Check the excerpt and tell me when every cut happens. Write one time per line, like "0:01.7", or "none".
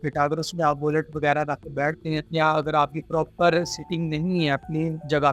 none